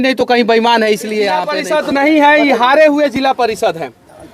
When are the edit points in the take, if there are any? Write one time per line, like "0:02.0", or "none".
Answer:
0:01.6